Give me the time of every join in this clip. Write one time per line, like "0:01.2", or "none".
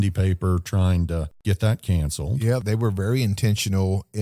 0:01.4
0:02.6